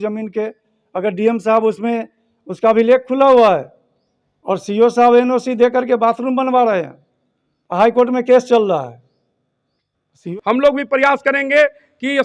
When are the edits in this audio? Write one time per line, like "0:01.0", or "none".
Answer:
0:10.2